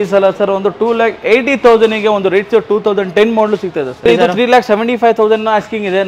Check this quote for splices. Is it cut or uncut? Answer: cut